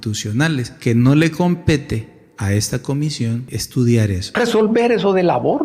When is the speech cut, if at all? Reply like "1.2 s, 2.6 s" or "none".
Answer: 3.5 s, 4.2 s